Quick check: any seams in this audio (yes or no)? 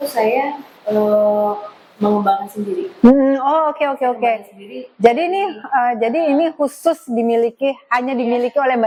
no